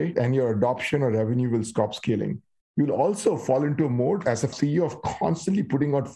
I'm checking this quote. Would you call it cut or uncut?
cut